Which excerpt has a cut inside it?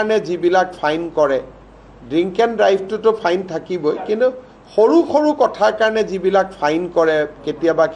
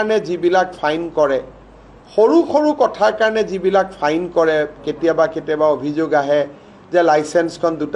second; 1 cut; at 1.9 s

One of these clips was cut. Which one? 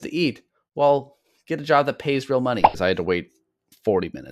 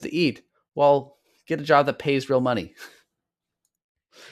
first; 1 cut; at 2.8 s

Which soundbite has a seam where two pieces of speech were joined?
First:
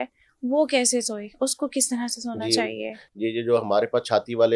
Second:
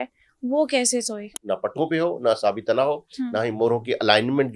second; 1 cut; at 1.3 s

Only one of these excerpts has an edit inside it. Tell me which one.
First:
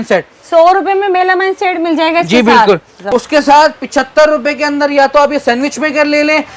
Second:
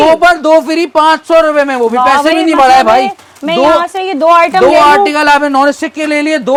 first; 1 cut; at 3.0 s

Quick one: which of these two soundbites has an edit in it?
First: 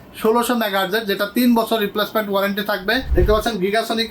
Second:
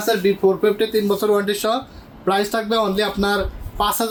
first; 1 cut; at 3.1 s

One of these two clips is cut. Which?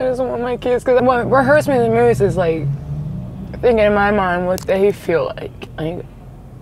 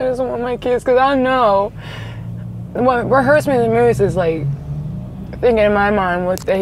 first; 2 cuts; at 1.0 s, 5.6 s

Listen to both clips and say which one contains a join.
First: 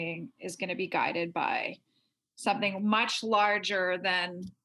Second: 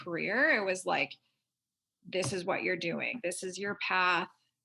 second; 1 cut; at 3.1 s

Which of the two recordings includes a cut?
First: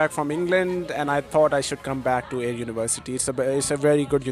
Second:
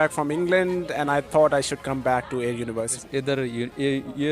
second; 1 cut; at 3.0 s

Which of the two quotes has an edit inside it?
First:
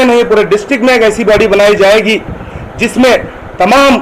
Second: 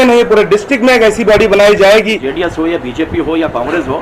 second; 1 cut; at 2.2 s

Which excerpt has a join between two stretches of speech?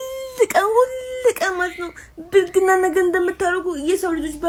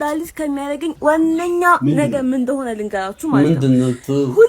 second; 1 cut; at 0.9 s

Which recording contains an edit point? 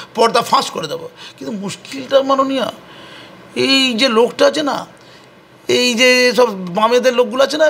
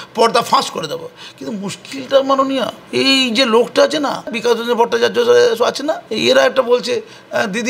second; 3 cuts; at 2.8 s, 4.4 s, 6.1 s

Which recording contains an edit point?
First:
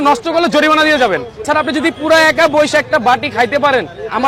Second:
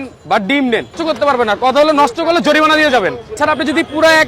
second; 1 cut; at 1.0 s

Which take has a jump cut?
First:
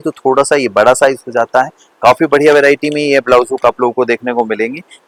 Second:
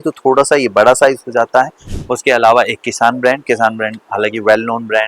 second; 1 cut; at 1.8 s

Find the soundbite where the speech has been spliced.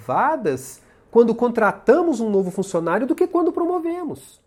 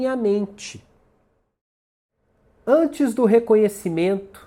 second; 1 cut; at 1.5 s

